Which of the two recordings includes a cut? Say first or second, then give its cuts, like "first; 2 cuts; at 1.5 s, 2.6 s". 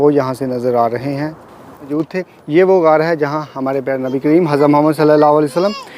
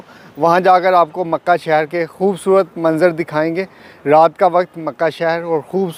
first; 1 cut; at 1.9 s